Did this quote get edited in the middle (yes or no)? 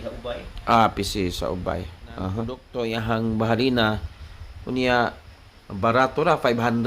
yes